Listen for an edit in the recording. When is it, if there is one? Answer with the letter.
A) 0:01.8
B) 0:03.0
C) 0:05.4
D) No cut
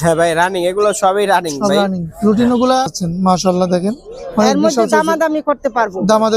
B